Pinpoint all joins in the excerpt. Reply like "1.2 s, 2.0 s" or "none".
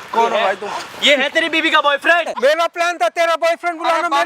2.3 s